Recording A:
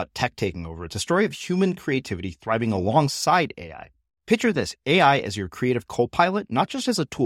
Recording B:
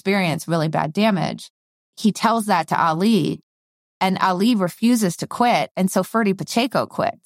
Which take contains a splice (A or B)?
B